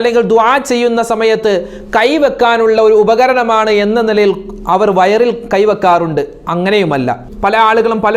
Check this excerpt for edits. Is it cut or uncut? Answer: cut